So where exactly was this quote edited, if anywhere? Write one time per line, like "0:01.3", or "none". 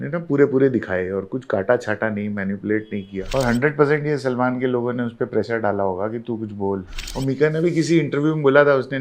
0:03.2
0:07.0